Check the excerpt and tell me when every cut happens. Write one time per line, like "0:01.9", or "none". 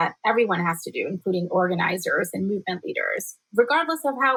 none